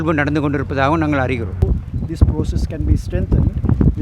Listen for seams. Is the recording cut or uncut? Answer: cut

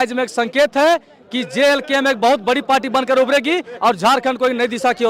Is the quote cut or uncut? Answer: uncut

